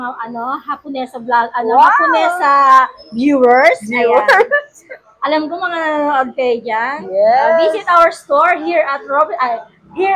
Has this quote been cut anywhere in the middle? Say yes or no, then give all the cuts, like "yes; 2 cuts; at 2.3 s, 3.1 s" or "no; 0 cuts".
no; 0 cuts